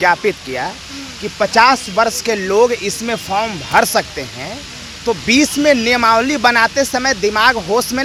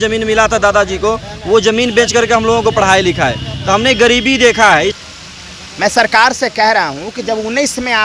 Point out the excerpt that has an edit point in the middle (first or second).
second